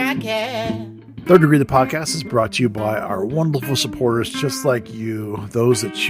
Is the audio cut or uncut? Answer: cut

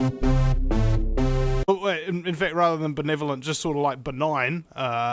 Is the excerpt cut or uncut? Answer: uncut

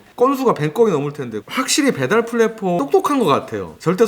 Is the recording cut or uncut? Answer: cut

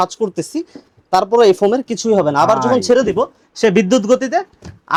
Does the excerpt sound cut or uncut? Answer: uncut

